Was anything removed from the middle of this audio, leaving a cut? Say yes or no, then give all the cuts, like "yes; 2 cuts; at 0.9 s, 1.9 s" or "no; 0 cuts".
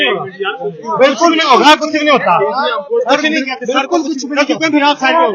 no; 0 cuts